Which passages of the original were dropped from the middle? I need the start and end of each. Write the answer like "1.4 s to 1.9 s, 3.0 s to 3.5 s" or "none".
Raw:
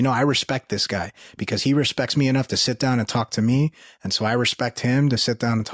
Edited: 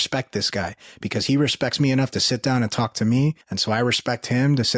3.9 s to 4.0 s